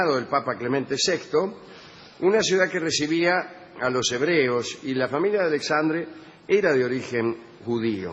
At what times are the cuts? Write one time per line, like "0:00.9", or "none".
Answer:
0:03.9

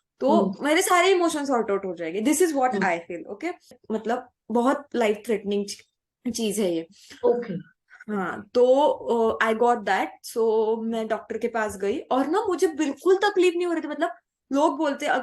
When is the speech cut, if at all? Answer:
0:03.8

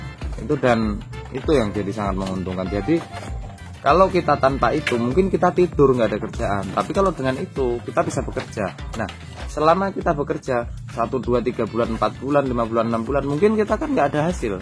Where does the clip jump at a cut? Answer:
none

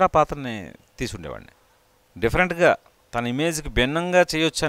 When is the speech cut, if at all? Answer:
0:01.5

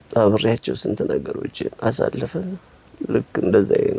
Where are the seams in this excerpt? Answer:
none

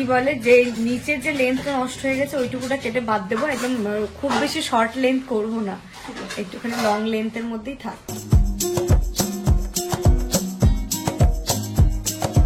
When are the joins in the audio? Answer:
none

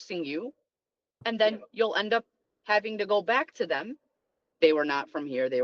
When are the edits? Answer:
0:01.2
0:04.5

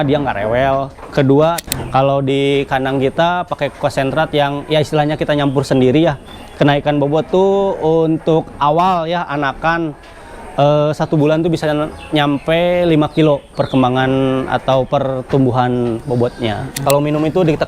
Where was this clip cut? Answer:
0:01.6
0:16.8

